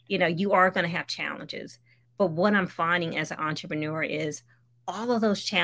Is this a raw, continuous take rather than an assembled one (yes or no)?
yes